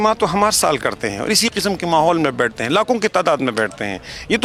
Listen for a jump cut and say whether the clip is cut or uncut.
uncut